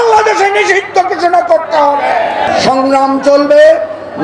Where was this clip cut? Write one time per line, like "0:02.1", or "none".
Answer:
0:02.5